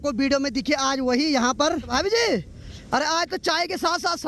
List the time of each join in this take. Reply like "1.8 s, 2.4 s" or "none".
1.9 s